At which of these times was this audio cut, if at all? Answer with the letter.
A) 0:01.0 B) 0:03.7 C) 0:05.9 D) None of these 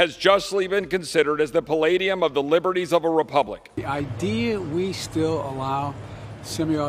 B